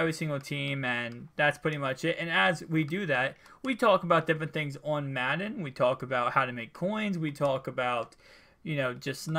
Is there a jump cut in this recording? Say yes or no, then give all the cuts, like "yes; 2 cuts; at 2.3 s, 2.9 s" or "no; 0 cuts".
yes; 1 cut; at 5.2 s